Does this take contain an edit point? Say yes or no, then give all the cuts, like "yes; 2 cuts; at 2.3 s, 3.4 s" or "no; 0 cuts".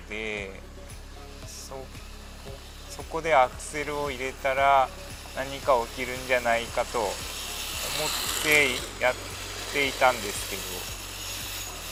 no; 0 cuts